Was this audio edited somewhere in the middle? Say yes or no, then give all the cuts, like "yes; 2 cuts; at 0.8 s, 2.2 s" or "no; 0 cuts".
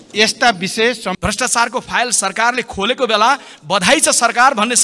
yes; 1 cut; at 1.2 s